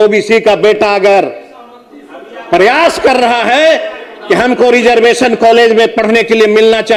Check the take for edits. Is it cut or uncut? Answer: uncut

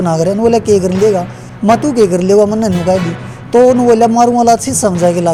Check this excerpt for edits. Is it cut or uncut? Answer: uncut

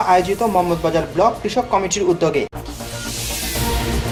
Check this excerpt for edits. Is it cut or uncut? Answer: uncut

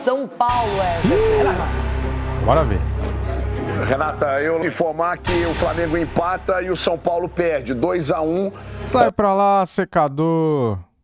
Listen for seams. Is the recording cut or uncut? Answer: uncut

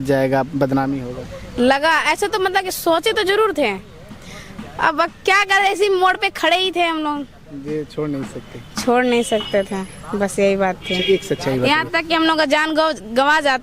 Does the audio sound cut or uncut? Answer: uncut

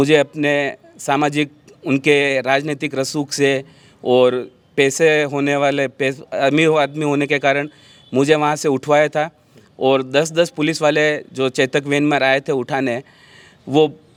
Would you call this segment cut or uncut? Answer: uncut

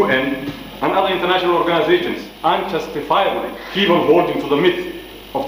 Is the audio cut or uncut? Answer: cut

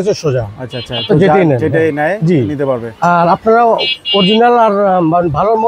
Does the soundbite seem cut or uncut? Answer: uncut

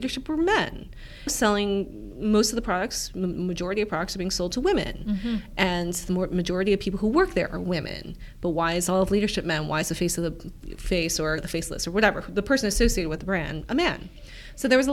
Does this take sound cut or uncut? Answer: uncut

